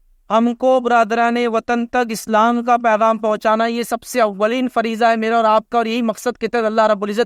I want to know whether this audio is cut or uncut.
uncut